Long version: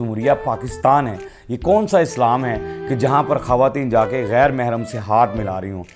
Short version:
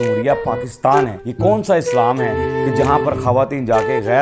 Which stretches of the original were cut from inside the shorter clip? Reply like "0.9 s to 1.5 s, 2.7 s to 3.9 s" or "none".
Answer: 1.2 s to 1.5 s